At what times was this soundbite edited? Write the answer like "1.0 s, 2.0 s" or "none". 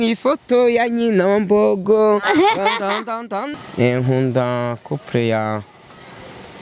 3.5 s